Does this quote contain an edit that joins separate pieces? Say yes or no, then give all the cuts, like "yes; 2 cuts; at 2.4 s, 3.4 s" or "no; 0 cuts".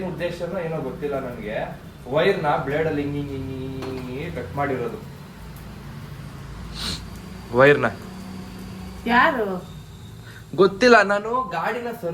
no; 0 cuts